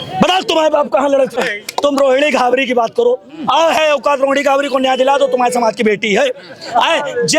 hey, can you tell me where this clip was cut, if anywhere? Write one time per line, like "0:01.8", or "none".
0:01.5